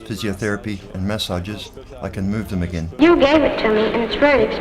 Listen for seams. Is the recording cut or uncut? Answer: uncut